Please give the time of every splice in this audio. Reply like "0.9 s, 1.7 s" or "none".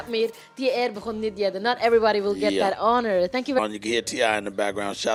none